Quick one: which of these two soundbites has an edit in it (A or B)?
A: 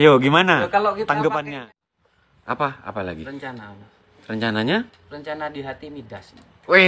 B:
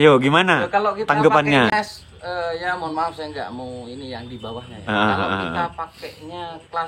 A